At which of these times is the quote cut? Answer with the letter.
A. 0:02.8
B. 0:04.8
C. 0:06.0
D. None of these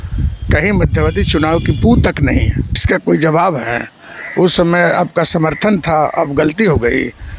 A